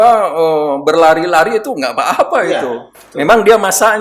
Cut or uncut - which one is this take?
uncut